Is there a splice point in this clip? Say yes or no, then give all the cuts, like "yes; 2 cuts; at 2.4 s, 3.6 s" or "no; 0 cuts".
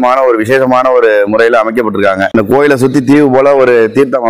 yes; 1 cut; at 2.3 s